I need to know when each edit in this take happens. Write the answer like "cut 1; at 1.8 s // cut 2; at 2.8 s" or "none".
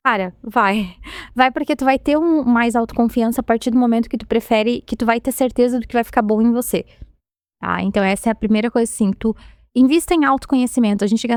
none